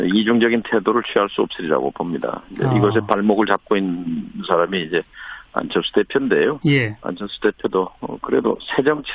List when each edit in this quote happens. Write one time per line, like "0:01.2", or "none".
none